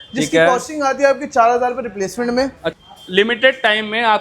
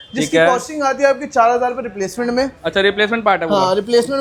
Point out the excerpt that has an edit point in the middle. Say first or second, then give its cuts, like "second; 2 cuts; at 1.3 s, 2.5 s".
first; 1 cut; at 2.7 s